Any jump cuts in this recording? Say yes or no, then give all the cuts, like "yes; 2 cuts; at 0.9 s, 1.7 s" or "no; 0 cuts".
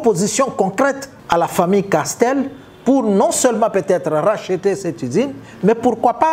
yes; 1 cut; at 1.1 s